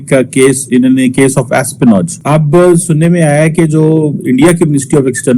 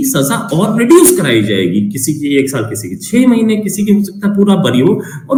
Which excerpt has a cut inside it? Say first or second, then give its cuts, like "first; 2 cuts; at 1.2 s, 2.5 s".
first; 1 cut; at 2.2 s